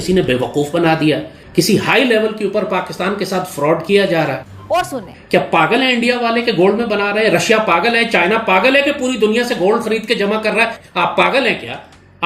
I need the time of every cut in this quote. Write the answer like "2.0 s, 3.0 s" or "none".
1.4 s, 4.8 s, 10.8 s